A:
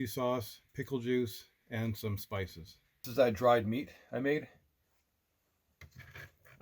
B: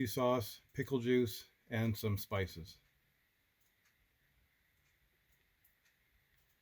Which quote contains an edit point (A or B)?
A